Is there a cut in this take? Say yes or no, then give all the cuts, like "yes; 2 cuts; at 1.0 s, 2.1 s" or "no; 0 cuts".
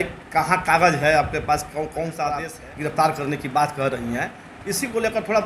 yes; 1 cut; at 2.6 s